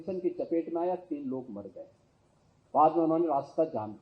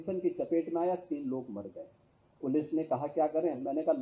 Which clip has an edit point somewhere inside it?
second; 1 cut; at 2.4 s

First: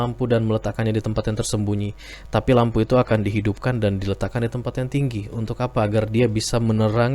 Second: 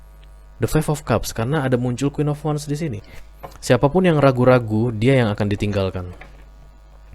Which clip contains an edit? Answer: second; 1 cut; at 3.1 s

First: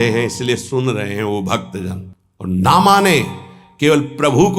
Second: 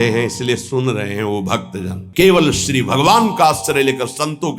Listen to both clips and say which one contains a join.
second; 1 cut; at 2.0 s

